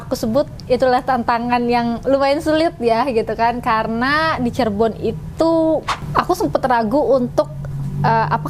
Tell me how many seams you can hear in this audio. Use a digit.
1